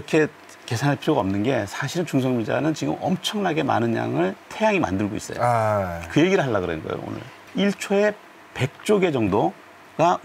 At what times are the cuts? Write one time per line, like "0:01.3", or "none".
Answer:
0:07.4